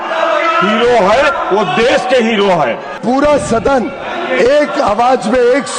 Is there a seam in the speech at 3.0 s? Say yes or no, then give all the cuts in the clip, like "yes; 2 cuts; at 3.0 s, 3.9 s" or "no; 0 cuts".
yes; 1 cut; at 3.0 s